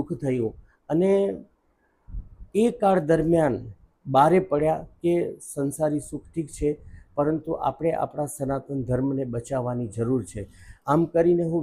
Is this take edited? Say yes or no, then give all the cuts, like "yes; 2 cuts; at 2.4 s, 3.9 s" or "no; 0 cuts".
no; 0 cuts